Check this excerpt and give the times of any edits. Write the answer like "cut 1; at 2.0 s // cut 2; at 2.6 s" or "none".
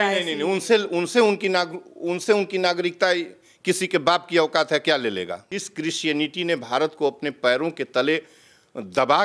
cut 1; at 5.5 s